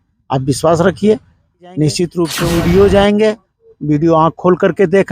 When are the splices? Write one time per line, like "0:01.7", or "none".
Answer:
0:02.4